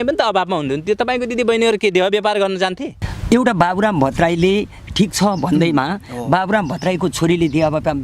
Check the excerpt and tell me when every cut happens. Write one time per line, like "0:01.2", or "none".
0:02.9